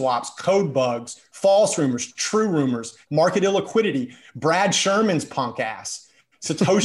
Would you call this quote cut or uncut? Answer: cut